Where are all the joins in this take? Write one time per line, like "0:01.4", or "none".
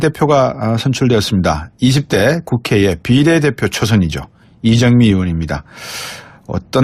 none